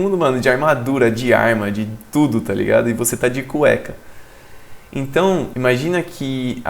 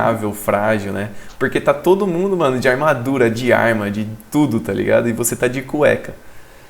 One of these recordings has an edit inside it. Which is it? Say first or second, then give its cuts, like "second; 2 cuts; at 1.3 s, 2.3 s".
first; 1 cut; at 5.5 s